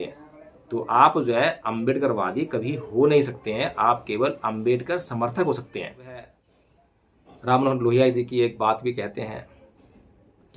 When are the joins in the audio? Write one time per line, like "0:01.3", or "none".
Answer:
0:06.6